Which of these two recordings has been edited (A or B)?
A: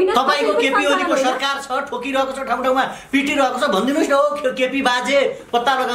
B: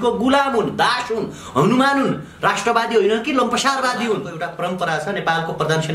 B